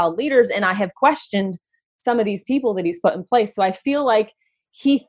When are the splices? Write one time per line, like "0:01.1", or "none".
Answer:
none